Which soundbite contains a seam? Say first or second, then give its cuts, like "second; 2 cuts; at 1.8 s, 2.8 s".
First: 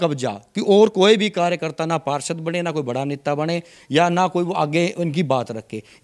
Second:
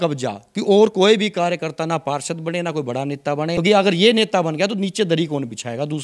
second; 1 cut; at 3.5 s